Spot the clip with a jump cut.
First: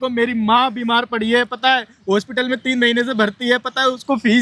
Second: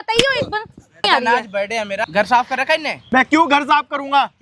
second; 3 cuts; at 1.0 s, 2.1 s, 2.9 s

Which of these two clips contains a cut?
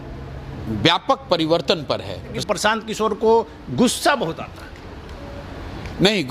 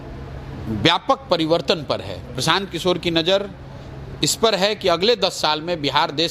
first; 1 cut; at 2.4 s

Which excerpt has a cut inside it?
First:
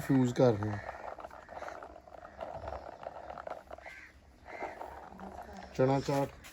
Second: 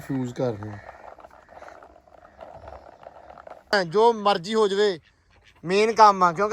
second; 1 cut; at 3.7 s

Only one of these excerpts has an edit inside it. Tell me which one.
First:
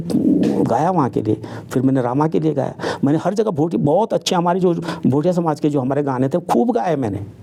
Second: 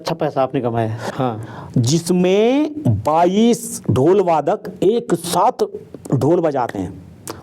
second; 1 cut; at 1.0 s

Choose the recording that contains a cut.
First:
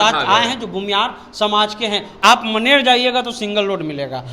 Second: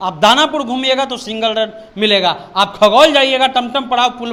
first; 1 cut; at 2.2 s

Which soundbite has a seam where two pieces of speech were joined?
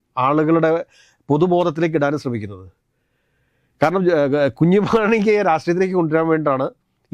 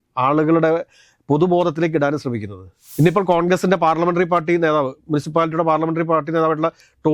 second; 1 cut; at 2.8 s

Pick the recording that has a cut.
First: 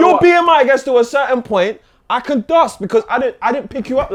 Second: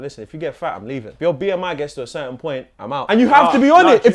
second; 2 cuts; at 1.1 s, 2.9 s

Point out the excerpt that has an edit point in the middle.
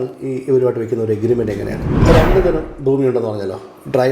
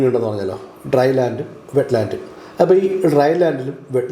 first; 1 cut; at 1.9 s

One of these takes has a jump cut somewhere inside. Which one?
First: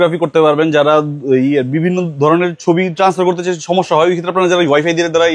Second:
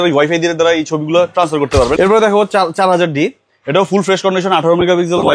second; 1 cut; at 2.0 s

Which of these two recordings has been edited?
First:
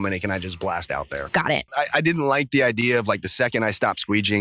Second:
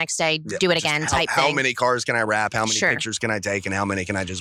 first; 1 cut; at 1.7 s

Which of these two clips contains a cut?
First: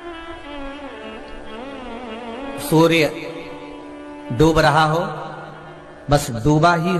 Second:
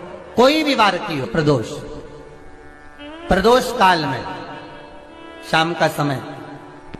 second; 1 cut; at 1.3 s

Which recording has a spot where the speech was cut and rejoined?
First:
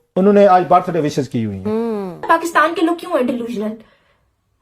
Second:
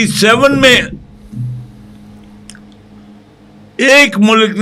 first; 1 cut; at 2.1 s

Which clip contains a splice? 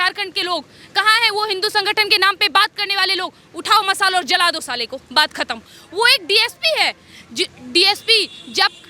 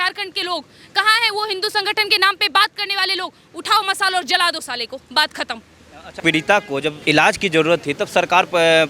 first; 1 cut; at 5.8 s

